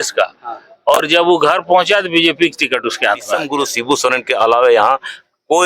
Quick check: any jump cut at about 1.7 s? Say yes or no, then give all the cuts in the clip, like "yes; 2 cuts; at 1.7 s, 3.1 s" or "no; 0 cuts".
no; 1 cut; at 3.5 s